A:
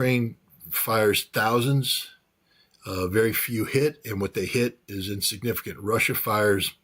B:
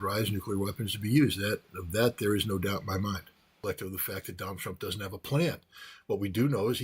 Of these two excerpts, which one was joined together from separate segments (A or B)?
B